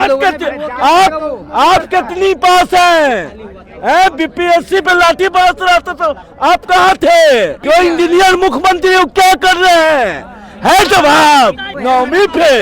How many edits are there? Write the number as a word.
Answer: two